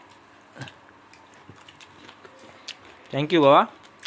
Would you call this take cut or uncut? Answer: uncut